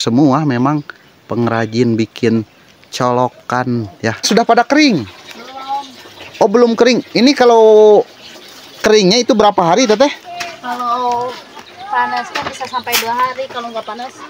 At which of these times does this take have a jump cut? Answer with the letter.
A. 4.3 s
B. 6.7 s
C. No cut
A